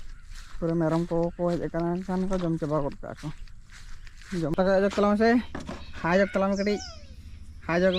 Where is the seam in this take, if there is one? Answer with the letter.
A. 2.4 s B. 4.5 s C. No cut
B